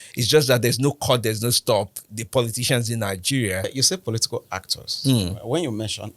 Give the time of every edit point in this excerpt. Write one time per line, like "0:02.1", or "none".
0:03.7